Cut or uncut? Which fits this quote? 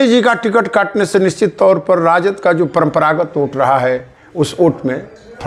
uncut